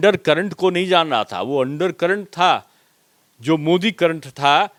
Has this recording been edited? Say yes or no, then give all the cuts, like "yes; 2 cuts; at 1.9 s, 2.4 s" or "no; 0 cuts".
no; 0 cuts